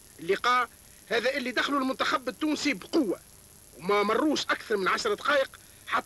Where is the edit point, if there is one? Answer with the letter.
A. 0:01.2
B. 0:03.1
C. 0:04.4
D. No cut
C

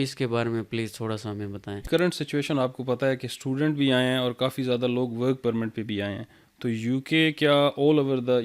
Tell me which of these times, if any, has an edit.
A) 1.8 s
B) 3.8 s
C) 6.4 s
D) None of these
A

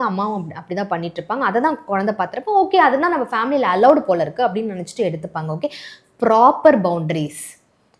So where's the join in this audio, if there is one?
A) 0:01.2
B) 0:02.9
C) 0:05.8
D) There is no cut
D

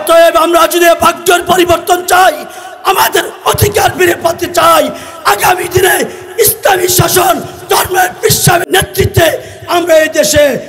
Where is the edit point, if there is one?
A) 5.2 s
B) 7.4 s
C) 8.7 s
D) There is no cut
C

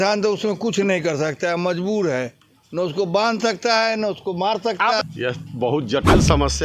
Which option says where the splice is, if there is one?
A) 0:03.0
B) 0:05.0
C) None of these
B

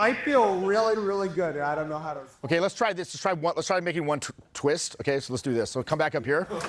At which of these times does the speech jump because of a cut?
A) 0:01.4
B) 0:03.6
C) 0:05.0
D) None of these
D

